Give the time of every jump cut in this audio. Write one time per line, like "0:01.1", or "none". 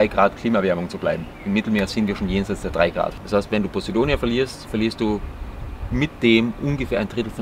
0:03.2